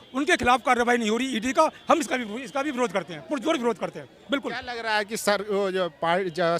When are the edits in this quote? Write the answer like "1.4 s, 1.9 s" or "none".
none